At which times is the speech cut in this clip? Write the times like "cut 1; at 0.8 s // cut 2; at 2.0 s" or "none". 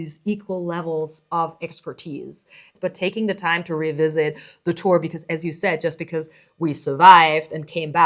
cut 1; at 2.7 s

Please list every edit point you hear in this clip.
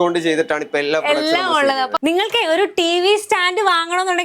cut 1; at 1.9 s

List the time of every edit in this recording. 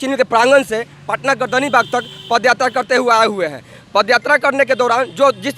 none

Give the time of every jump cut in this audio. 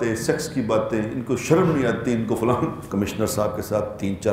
cut 1; at 2.9 s

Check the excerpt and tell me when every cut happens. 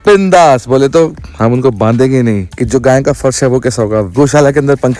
cut 1; at 2.5 s // cut 2; at 4.1 s

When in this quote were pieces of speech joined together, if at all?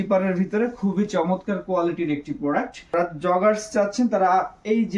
cut 1; at 2.9 s

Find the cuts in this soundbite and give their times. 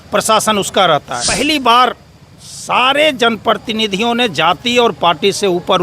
cut 1; at 1.5 s

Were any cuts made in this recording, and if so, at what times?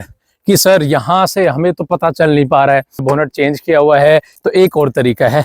cut 1; at 3.0 s // cut 2; at 4.4 s

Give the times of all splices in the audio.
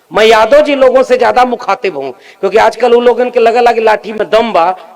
none

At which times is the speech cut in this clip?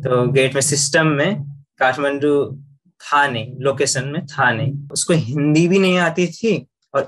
cut 1; at 4.8 s

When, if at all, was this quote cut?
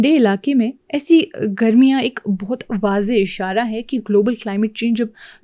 none

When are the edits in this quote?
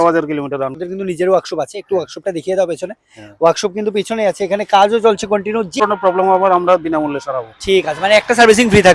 cut 1; at 0.8 s // cut 2; at 5.8 s

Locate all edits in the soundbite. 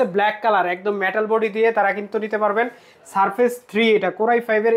none

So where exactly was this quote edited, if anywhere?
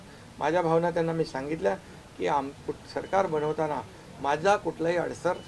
none

